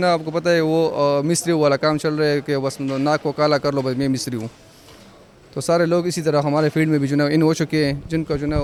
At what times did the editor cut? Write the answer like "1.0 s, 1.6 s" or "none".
none